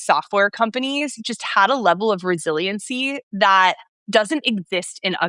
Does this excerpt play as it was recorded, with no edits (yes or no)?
yes